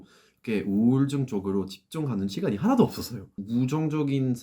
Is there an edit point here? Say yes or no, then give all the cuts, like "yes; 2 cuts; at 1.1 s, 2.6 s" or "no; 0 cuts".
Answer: yes; 1 cut; at 3.4 s